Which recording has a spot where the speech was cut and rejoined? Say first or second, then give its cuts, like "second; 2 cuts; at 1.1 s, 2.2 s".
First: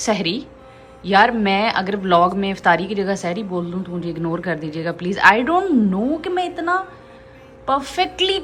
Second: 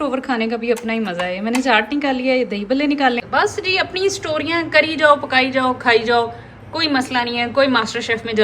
second; 1 cut; at 3.2 s